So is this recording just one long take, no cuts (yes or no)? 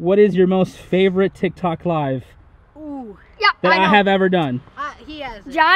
yes